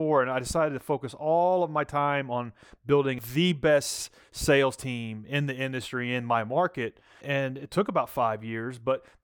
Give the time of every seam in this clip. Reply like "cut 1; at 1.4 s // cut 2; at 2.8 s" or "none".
cut 1; at 3.2 s // cut 2; at 7.2 s